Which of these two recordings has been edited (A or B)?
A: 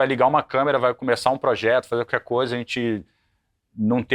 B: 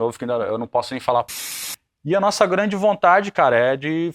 B